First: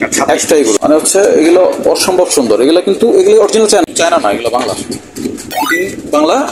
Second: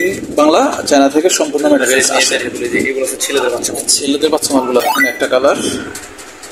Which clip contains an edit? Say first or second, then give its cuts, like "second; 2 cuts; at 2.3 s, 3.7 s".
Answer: first; 2 cuts; at 0.8 s, 3.8 s